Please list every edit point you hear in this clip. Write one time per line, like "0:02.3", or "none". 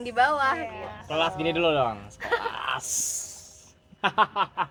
none